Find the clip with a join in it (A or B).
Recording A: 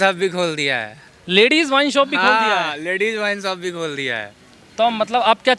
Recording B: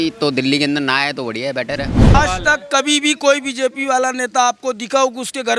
B